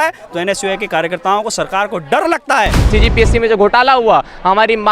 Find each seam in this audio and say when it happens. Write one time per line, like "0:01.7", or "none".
0:02.9